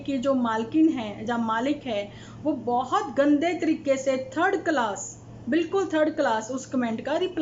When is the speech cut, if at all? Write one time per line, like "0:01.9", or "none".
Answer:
none